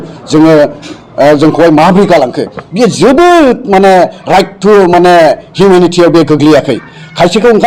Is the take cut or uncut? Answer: uncut